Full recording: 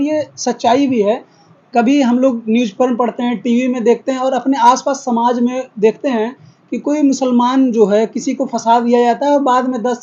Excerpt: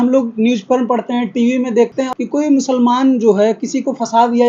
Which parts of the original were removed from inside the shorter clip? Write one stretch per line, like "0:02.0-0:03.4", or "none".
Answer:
0:04.2-0:06.6